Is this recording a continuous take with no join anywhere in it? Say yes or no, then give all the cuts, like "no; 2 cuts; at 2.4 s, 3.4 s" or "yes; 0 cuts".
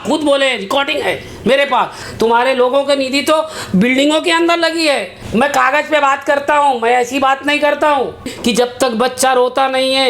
no; 3 cuts; at 2.0 s, 5.2 s, 8.3 s